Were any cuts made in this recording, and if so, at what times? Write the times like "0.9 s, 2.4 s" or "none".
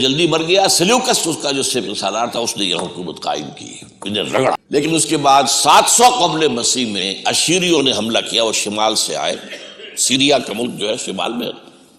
4.6 s